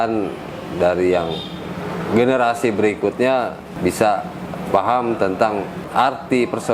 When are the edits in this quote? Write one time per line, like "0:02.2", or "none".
0:03.7
0:05.8

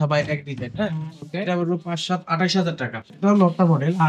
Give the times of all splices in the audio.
0:03.0

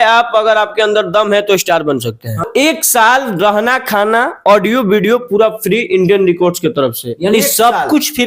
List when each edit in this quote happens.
0:02.5

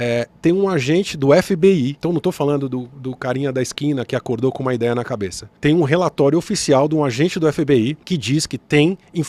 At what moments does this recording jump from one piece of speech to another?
0:02.0

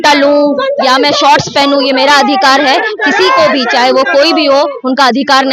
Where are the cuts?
none

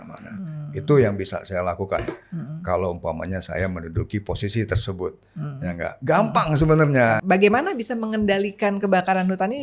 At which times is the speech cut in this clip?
0:07.2

